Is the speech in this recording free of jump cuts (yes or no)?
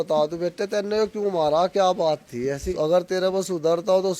no